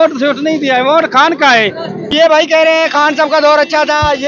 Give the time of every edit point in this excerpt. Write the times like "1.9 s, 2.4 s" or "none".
2.1 s